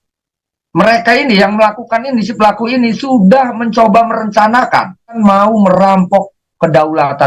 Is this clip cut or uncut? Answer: cut